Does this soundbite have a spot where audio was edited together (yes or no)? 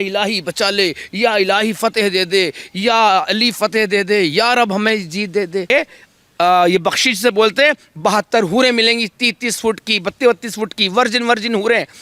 yes